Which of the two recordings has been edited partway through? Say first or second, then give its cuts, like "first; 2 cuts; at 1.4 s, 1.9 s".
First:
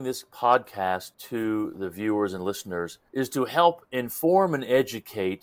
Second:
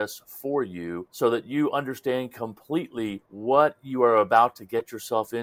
first; 1 cut; at 1.2 s